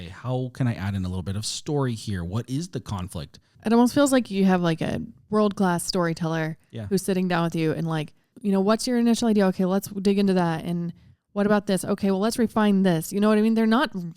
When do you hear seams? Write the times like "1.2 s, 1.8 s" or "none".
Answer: 3.4 s, 5.1 s, 8.3 s